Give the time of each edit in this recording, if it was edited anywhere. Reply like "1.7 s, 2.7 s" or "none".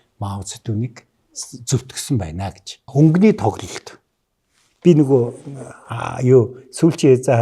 2.9 s